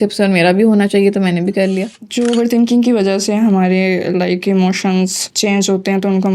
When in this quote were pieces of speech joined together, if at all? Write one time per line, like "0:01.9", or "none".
0:01.9